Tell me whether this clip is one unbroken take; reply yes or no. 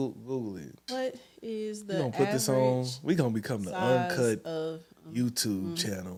yes